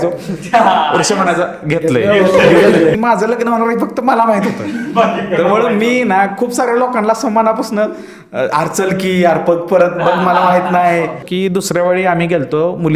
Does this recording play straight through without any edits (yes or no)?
no